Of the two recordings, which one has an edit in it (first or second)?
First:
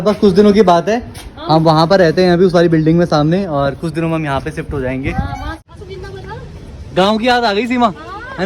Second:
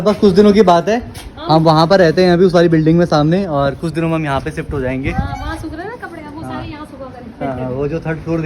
first